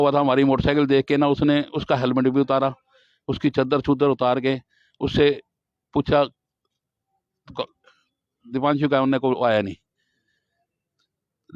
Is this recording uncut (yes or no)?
yes